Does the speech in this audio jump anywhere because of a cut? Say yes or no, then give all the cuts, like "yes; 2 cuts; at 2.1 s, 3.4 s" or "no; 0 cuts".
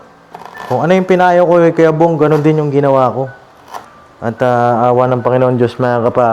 no; 0 cuts